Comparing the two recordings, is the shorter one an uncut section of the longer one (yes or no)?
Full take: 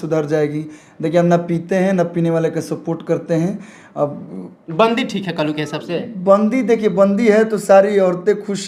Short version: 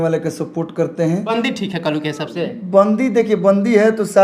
no